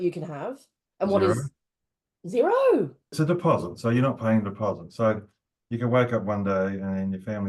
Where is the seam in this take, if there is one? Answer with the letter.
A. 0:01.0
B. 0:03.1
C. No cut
B